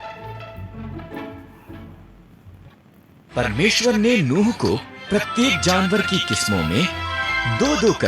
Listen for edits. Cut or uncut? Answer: cut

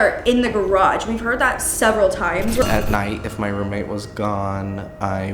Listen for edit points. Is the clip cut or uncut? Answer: cut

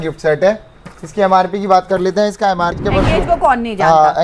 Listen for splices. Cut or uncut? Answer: cut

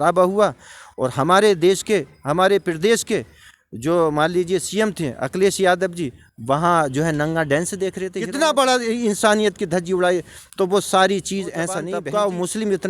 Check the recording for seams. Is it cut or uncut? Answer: cut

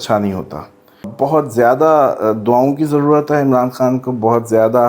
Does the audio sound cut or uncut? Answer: cut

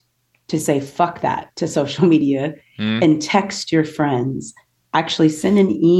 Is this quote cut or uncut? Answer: uncut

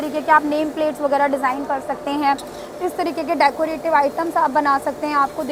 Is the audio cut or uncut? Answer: uncut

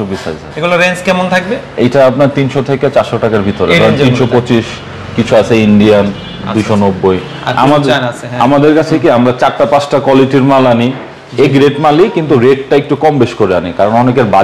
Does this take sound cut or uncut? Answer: uncut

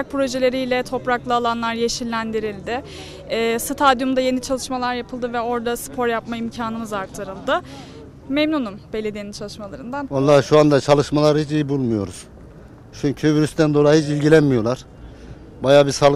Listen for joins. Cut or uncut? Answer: uncut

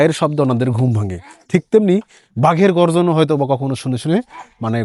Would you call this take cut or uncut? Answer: uncut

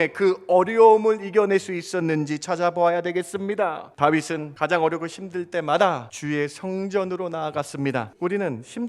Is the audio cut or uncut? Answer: cut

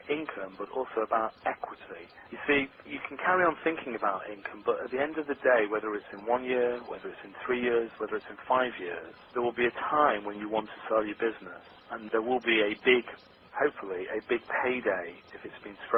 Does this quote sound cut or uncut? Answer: uncut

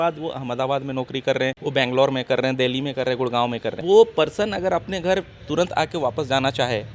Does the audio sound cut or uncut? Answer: cut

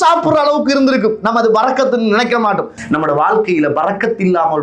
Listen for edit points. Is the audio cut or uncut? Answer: cut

